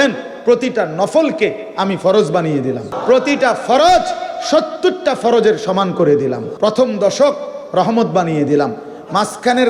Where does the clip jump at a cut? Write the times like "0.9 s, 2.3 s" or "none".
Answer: 2.9 s, 6.5 s